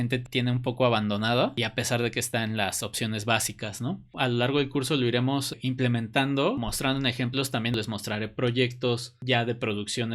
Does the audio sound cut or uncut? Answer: cut